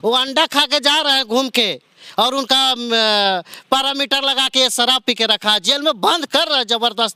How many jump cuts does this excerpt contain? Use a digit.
0